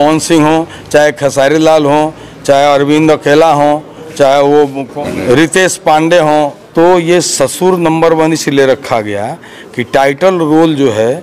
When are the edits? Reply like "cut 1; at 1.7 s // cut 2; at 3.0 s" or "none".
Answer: cut 1; at 4.9 s // cut 2; at 6.6 s